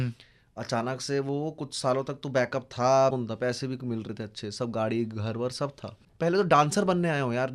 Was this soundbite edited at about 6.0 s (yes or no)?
yes